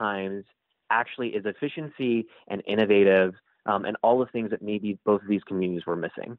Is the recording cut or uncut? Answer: uncut